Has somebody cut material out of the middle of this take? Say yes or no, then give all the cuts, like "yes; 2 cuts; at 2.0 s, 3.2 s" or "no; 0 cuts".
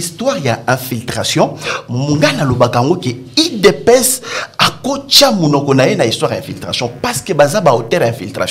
no; 0 cuts